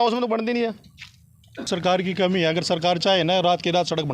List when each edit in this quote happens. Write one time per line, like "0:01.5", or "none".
0:01.7